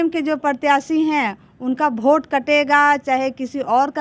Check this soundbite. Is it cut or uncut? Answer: uncut